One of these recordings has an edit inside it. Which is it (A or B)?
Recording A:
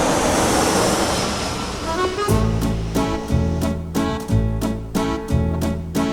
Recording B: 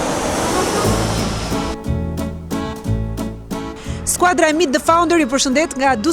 B